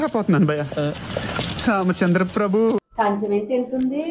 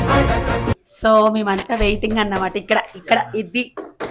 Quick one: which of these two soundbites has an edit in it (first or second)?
first